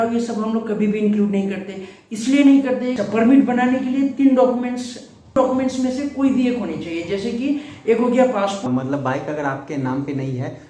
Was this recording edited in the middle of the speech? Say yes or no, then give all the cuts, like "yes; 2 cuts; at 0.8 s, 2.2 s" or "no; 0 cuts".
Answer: yes; 3 cuts; at 3.0 s, 5.4 s, 8.6 s